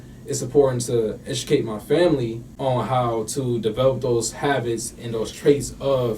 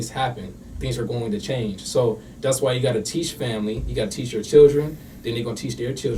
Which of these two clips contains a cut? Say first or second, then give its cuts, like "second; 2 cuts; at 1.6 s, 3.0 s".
first; 1 cut; at 2.4 s